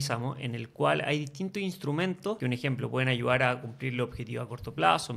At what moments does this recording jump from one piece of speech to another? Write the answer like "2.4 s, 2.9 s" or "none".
2.4 s